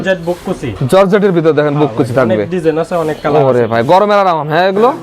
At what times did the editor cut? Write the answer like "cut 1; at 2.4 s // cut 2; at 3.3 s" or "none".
none